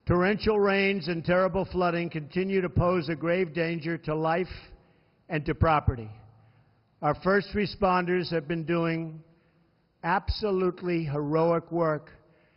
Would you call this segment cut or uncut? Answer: cut